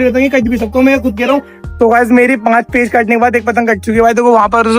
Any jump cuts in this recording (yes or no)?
yes